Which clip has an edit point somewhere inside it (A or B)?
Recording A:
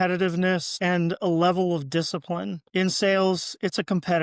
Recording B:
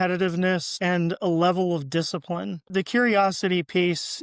A